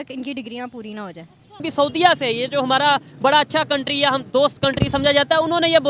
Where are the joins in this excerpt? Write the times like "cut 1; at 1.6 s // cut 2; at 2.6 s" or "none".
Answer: cut 1; at 1.6 s